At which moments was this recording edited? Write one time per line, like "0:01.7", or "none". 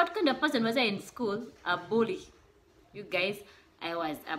none